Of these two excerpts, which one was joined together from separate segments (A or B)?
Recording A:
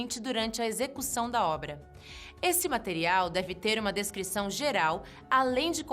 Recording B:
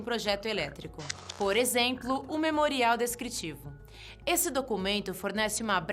A